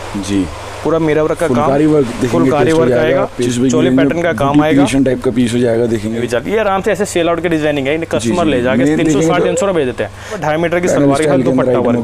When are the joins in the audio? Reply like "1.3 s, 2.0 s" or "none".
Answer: 3.5 s, 6.2 s, 10.4 s